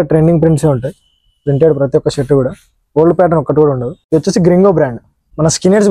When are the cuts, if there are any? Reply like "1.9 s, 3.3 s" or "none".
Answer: none